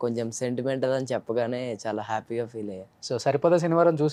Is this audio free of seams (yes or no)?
yes